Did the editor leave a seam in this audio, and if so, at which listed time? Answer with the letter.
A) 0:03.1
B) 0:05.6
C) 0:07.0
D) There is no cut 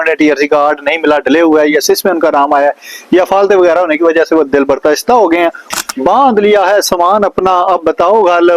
B